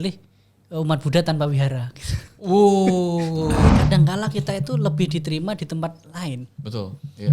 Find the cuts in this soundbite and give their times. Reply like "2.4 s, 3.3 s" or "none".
3.6 s